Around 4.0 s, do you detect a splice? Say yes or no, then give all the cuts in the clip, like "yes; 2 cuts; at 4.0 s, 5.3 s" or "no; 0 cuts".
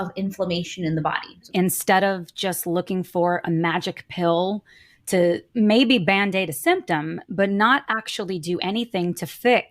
no; 1 cut; at 1.5 s